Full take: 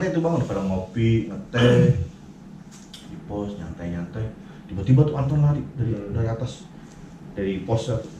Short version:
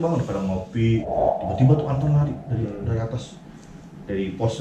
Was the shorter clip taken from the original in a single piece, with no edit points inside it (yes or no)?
no